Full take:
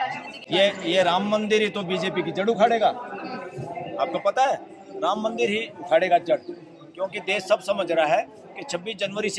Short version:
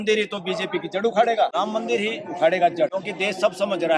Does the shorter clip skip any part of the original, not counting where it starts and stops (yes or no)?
yes